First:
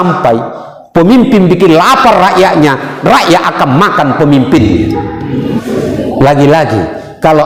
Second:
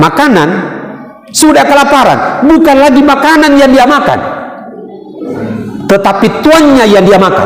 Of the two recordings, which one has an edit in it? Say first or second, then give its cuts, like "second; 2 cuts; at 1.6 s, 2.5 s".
first; 1 cut; at 5.6 s